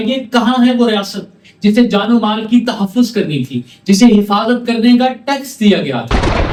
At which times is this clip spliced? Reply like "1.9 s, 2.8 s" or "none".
none